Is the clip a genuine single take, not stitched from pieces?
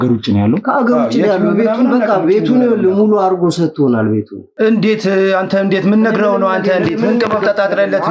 no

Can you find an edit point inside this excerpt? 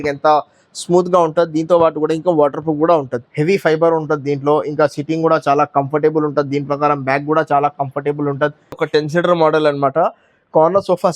yes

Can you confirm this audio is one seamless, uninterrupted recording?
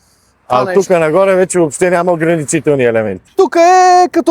no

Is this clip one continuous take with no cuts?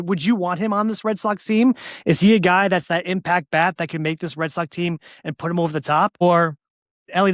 no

